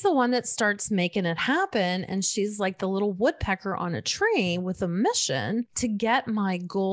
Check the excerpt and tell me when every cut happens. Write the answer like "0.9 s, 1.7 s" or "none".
5.7 s